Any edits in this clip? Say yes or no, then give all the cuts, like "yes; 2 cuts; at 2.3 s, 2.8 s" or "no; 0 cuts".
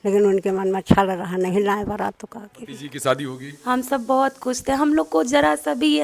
yes; 1 cut; at 2.8 s